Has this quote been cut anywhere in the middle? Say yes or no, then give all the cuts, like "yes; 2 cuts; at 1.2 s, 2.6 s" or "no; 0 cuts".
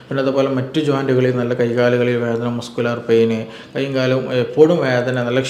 no; 0 cuts